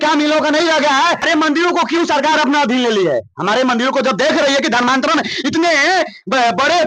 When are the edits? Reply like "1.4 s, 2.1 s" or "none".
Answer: 1.2 s